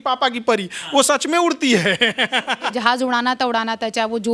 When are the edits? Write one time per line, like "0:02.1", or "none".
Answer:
0:02.8